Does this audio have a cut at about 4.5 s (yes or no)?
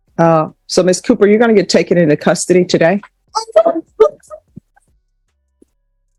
no